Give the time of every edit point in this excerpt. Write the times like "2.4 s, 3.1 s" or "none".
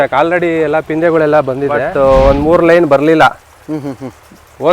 1.9 s